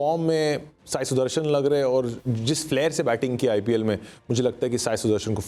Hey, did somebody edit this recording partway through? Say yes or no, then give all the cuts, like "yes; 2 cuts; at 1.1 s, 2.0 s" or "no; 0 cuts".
no; 0 cuts